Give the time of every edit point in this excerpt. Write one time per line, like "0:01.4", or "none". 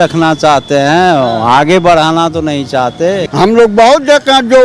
0:03.2